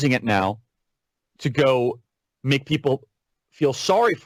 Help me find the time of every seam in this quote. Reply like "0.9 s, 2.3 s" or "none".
none